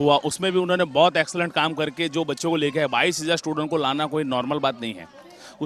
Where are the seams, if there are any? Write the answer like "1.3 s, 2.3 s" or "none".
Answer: none